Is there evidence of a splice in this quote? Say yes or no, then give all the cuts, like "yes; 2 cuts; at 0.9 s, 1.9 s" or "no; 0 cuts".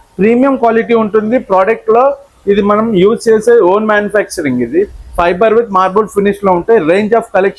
no; 0 cuts